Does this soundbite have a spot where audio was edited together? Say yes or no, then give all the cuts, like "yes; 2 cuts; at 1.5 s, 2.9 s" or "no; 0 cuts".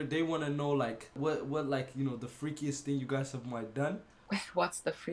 yes; 2 cuts; at 1.2 s, 4.1 s